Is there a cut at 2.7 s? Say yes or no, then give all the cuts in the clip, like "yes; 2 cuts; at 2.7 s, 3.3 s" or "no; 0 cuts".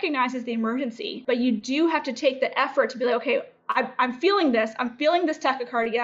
no; 1 cut; at 1.1 s